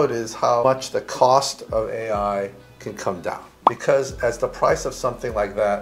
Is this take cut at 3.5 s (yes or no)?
yes